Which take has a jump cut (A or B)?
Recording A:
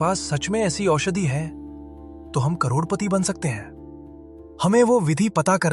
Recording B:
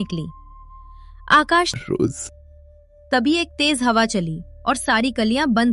B